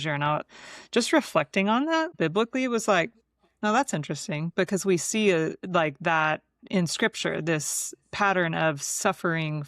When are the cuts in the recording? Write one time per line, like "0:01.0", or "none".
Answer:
0:02.1